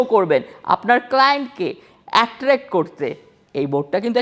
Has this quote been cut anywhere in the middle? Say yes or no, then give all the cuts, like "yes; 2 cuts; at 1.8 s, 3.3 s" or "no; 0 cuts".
no; 0 cuts